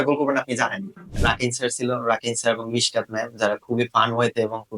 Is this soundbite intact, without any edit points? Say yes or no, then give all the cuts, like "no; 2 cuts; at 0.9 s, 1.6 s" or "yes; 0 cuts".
no; 1 cut; at 1.2 s